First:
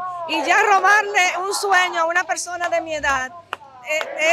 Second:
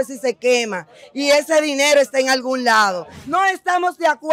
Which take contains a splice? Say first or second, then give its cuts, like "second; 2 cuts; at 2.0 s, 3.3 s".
second; 1 cut; at 3.1 s